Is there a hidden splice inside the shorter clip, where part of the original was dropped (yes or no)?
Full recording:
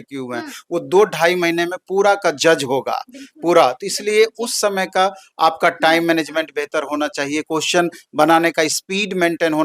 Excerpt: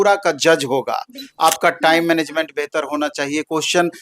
yes